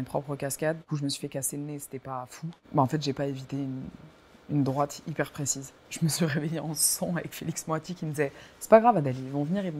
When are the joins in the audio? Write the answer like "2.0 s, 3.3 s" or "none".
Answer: 0.8 s, 2.5 s, 5.8 s